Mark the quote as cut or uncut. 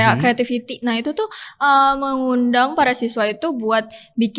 uncut